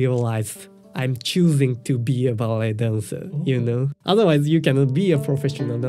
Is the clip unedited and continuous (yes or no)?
no